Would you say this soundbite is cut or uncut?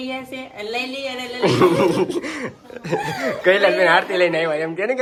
uncut